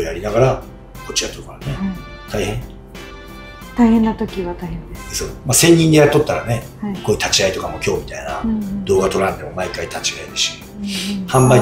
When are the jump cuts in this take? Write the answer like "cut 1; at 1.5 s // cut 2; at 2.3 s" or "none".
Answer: none